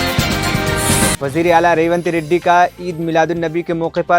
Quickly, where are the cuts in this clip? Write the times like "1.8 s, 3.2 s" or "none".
1.2 s

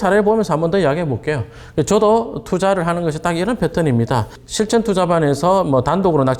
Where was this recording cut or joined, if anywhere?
none

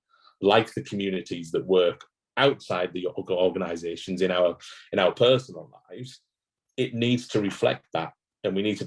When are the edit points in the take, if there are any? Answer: none

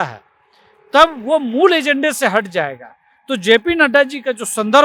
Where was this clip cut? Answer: none

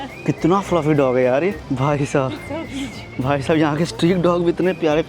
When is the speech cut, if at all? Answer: none

